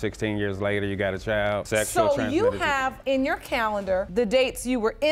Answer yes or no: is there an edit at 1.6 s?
yes